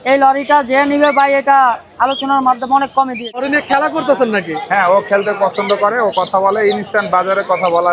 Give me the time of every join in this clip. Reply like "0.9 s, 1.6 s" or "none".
3.4 s